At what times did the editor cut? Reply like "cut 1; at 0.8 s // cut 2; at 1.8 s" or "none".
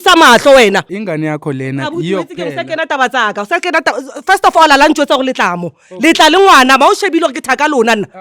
cut 1; at 0.9 s

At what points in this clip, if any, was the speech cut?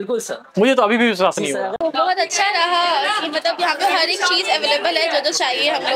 cut 1; at 1.7 s

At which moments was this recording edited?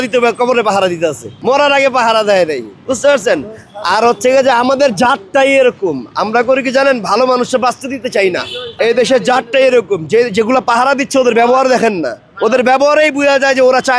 none

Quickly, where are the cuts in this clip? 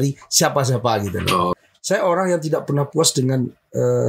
cut 1; at 1.6 s

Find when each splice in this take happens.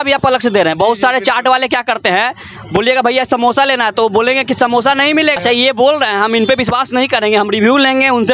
cut 1; at 5.4 s

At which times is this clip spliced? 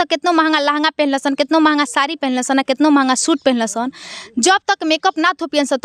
none

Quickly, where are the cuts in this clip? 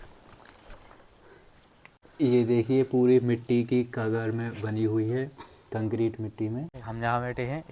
cut 1; at 2.0 s // cut 2; at 6.7 s

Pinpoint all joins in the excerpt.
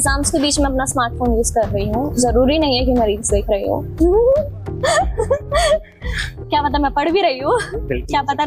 none

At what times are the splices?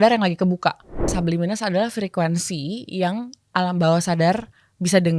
cut 1; at 1.1 s

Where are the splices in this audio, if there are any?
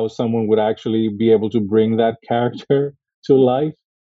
none

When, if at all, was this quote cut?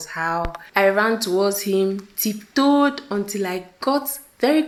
none

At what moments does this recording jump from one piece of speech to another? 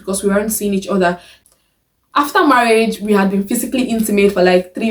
cut 1; at 1.3 s

